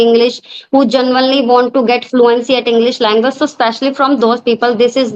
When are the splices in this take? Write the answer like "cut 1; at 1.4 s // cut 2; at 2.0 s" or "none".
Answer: none